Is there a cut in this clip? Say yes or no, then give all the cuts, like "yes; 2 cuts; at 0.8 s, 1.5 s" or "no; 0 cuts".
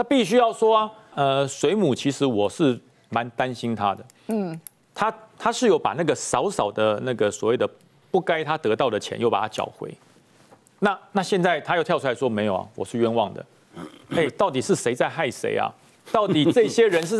yes; 1 cut; at 1.1 s